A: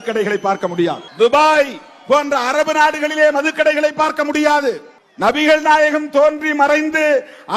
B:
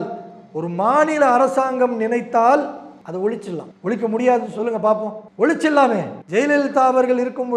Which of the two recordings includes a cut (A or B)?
B